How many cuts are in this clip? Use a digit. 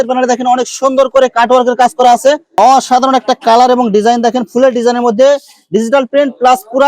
1